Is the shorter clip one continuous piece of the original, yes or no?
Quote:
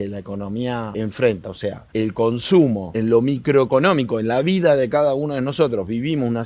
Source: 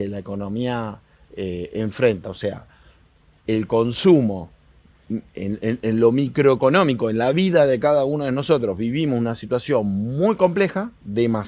no